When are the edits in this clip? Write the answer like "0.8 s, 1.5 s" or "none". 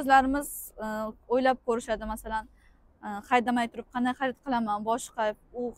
none